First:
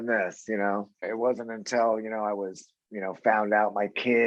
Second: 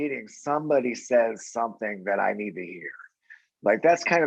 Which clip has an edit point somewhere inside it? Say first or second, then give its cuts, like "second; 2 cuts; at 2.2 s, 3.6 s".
first; 1 cut; at 1.0 s